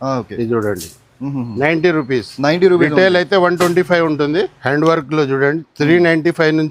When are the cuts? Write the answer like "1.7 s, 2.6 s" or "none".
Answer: 4.6 s

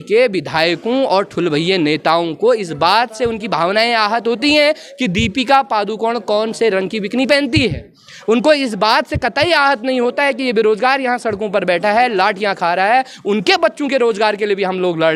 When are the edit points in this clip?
none

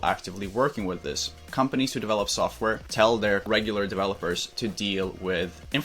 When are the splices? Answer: 1.4 s, 2.8 s, 3.4 s

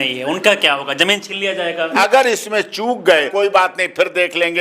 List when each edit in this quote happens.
1.9 s, 3.3 s

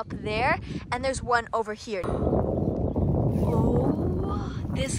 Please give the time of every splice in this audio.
2.0 s

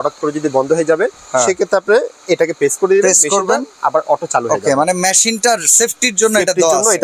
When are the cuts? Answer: none

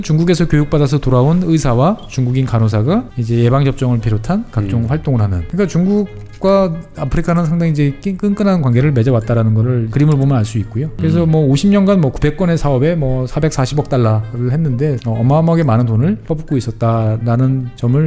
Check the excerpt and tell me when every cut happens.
3.2 s, 5.4 s, 9.9 s, 10.9 s, 15.0 s, 16.2 s

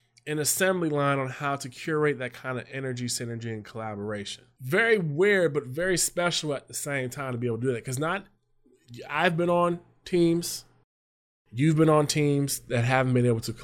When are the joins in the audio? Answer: 4.5 s

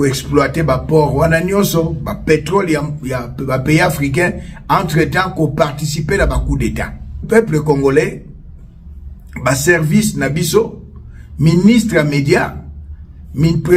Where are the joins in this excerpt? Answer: 7.2 s

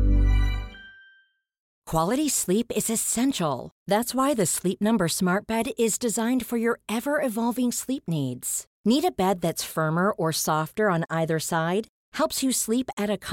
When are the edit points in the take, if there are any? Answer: 1.8 s

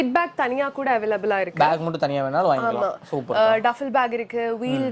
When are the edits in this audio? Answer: none

